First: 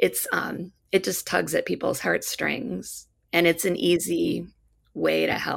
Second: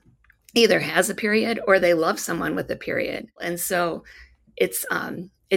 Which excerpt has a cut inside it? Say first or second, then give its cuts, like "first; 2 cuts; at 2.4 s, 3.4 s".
second; 1 cut; at 3.4 s